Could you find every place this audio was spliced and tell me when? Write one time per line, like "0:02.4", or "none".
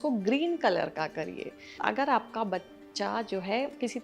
0:01.8